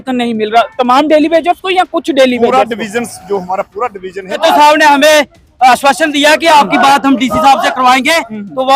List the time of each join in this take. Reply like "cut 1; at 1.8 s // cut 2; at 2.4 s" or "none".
cut 1; at 4.4 s